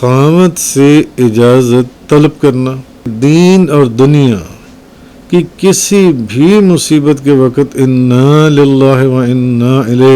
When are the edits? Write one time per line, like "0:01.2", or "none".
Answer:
0:03.1